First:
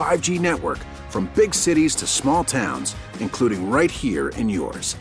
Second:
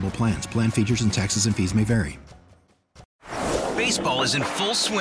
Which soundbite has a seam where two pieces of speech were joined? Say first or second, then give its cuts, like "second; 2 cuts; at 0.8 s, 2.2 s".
second; 1 cut; at 3.0 s